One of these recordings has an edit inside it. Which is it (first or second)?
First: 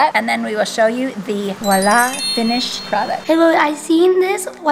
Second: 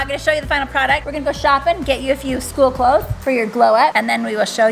first